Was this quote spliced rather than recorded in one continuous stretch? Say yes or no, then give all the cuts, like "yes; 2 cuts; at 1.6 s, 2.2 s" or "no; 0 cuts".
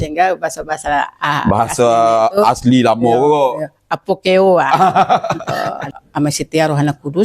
yes; 1 cut; at 5.5 s